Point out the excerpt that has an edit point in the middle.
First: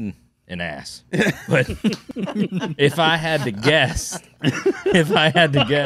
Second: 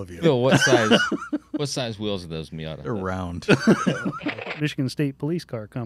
second; 1 cut; at 4.4 s

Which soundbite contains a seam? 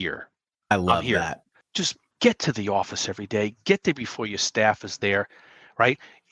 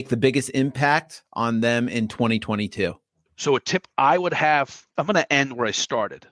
second; 2 cuts; at 3.0 s, 4.8 s

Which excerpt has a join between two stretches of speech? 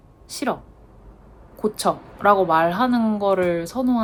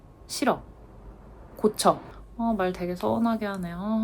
second; 1 cut; at 2.1 s

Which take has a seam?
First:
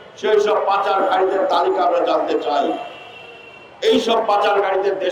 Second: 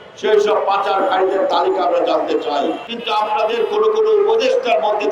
second; 1 cut; at 2.9 s

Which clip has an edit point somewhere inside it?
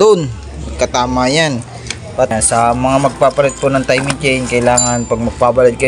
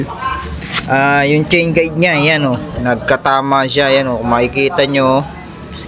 first; 1 cut; at 2.3 s

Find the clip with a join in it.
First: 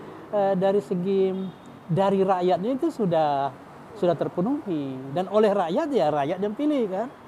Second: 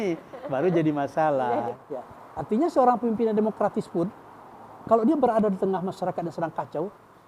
second; 1 cut; at 1.8 s

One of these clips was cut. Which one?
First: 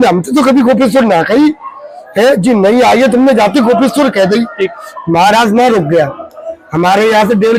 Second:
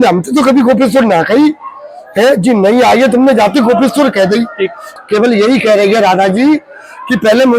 second; 1 cut; at 5.0 s

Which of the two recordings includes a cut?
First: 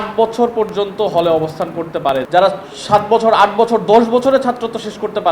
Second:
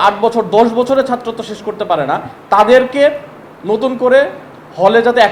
first; 1 cut; at 2.3 s

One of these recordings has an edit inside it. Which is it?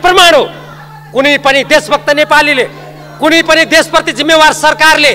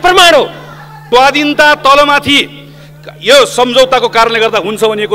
second; 1 cut; at 1.0 s

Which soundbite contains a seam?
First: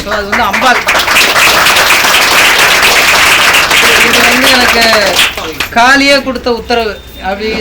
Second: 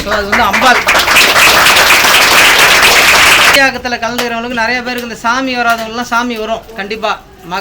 second; 1 cut; at 3.7 s

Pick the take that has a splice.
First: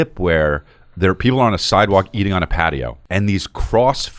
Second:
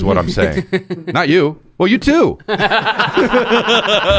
first; 1 cut; at 3.0 s

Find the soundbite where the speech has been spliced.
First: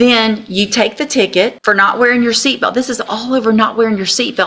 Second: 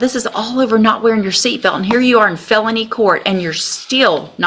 first; 1 cut; at 1.6 s

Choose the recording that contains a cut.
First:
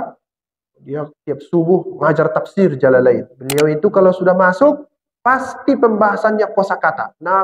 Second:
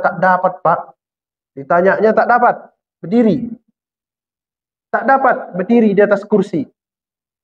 first; 1 cut; at 3.3 s

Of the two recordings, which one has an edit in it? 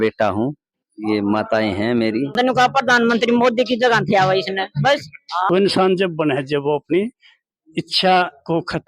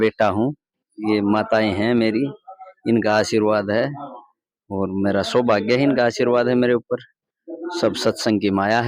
first; 2 cuts; at 2.4 s, 5.5 s

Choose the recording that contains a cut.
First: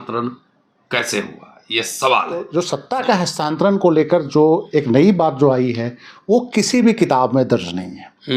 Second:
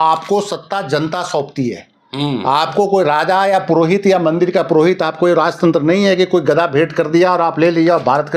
first; 1 cut; at 2.5 s

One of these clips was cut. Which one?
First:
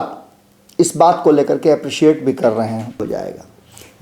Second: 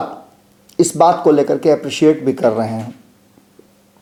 first; 1 cut; at 3.0 s

